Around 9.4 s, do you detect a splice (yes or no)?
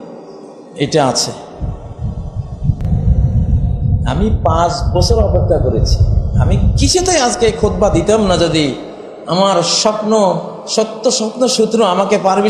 no